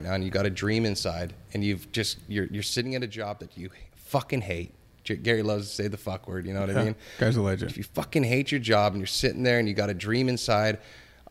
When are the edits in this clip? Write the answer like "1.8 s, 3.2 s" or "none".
none